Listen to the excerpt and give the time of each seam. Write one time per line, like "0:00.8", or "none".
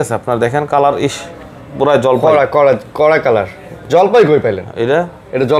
none